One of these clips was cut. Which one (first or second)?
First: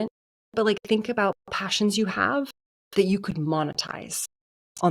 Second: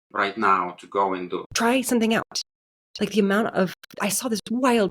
second